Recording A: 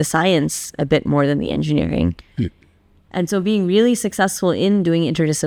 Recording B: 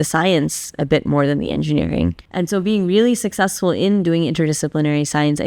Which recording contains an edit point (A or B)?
B